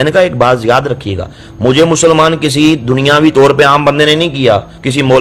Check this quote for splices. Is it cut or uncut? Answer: uncut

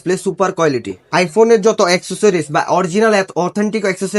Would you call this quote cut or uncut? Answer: uncut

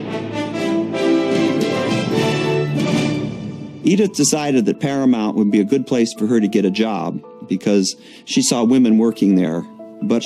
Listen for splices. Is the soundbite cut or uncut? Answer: uncut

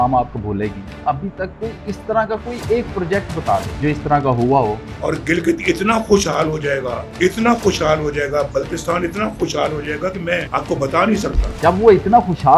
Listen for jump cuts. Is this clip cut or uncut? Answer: cut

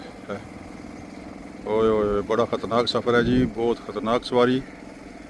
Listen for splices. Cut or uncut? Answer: uncut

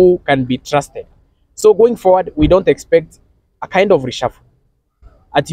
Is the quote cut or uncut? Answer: uncut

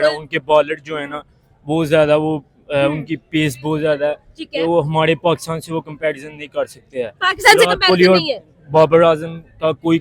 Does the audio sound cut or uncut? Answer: uncut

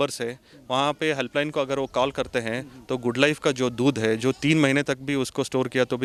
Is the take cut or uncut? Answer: uncut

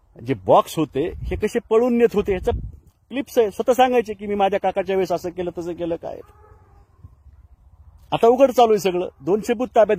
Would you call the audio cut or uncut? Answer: uncut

